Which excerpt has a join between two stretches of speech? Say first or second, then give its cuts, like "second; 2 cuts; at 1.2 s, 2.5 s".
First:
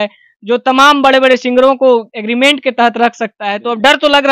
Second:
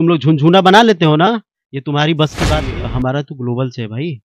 second; 1 cut; at 2.7 s